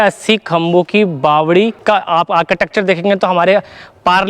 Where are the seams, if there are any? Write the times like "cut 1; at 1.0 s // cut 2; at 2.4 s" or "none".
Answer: cut 1; at 1.8 s